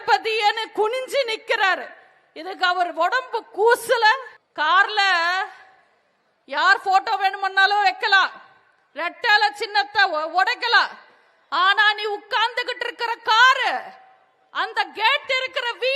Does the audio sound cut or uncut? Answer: cut